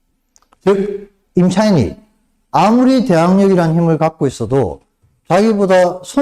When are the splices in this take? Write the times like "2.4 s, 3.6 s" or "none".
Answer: none